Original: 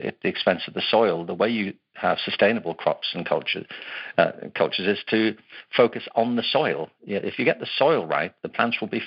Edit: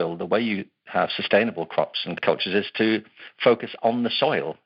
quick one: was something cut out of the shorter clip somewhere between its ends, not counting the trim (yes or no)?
yes